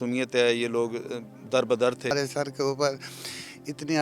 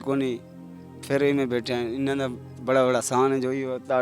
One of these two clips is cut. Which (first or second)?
first